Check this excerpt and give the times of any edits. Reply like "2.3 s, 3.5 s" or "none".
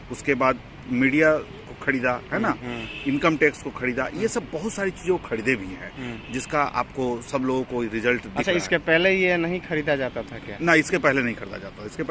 none